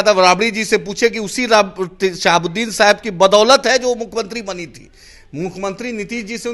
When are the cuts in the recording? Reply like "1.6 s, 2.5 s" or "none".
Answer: none